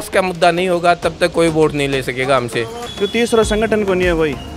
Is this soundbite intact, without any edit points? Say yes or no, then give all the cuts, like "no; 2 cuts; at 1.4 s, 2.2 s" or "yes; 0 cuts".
no; 1 cut; at 2.8 s